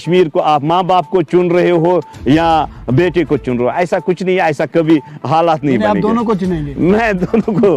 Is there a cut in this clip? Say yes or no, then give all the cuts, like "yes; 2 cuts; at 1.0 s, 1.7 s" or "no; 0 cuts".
no; 0 cuts